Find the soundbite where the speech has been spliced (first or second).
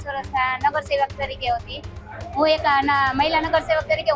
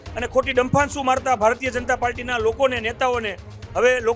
first